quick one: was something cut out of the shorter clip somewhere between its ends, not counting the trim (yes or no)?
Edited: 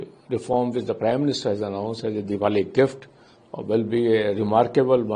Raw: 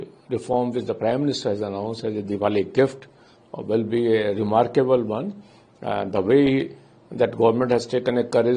no